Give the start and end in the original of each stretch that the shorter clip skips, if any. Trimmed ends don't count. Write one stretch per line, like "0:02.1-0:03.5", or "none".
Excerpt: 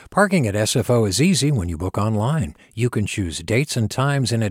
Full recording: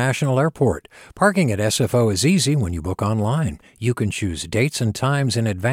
none